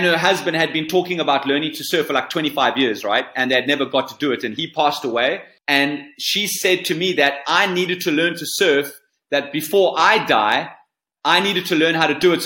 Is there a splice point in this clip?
yes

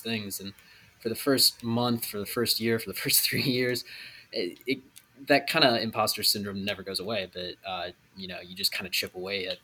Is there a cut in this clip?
no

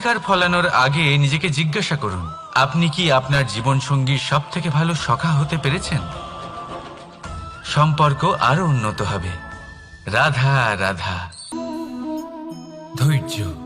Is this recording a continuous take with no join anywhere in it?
no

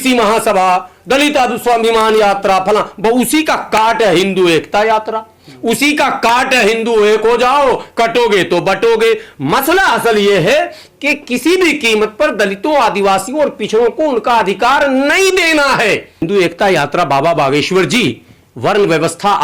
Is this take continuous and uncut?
no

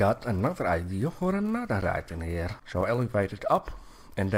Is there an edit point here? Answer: yes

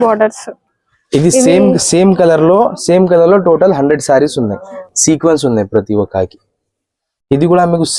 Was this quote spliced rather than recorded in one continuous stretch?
yes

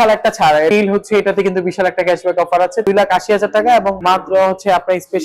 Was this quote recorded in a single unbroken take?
no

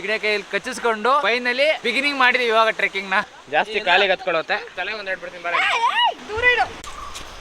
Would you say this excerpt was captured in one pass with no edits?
yes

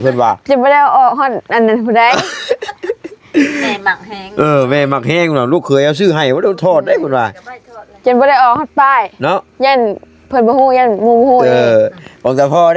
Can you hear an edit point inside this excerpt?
no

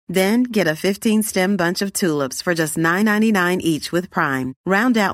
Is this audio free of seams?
yes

